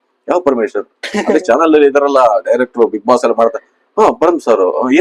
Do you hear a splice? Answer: no; 0 cuts

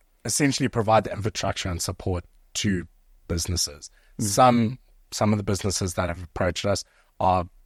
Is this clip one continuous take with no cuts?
yes; 0 cuts

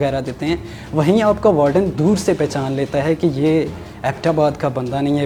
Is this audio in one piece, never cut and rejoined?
yes; 0 cuts

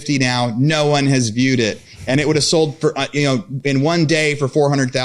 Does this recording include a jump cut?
no; 0 cuts

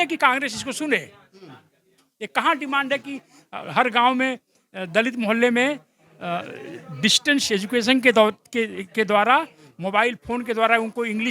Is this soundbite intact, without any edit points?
yes; 0 cuts

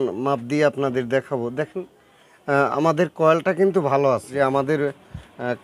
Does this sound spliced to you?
yes; 1 cut; at 4.3 s

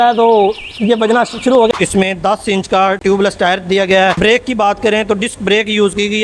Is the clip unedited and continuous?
no; 2 cuts; at 1.7 s, 4.2 s

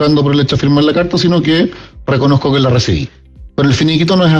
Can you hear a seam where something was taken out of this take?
no; 0 cuts

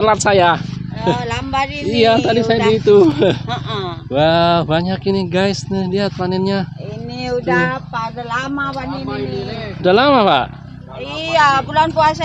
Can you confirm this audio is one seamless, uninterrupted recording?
yes; 0 cuts

